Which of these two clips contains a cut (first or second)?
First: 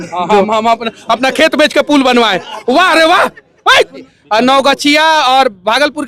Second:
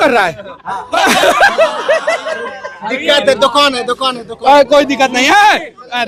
first